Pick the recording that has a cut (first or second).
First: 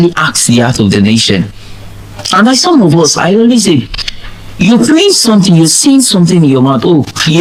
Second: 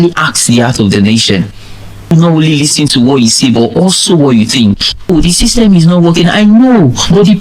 second